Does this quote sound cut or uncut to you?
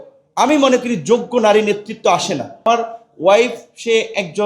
cut